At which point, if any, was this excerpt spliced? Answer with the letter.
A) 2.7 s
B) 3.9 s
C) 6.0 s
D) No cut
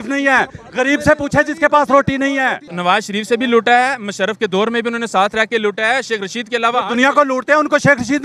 A